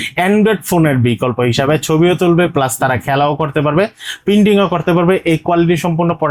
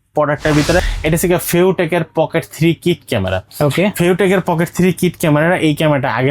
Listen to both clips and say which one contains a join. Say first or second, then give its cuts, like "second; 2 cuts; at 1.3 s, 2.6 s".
second; 1 cut; at 0.9 s